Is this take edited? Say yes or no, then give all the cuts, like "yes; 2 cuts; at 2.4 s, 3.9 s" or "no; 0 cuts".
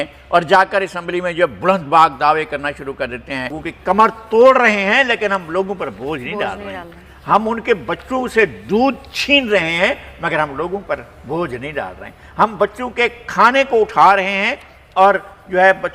yes; 1 cut; at 3.6 s